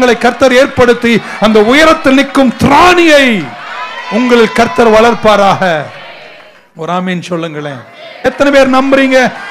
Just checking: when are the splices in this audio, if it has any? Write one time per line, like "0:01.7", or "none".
0:08.3